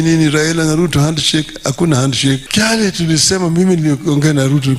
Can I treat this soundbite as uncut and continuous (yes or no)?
no